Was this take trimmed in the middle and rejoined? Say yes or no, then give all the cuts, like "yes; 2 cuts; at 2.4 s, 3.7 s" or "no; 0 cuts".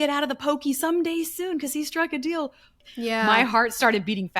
yes; 1 cut; at 2.8 s